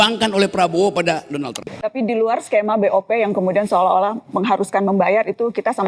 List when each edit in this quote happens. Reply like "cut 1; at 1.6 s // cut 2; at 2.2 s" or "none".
cut 1; at 1.7 s